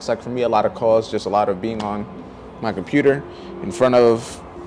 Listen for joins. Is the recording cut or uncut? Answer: uncut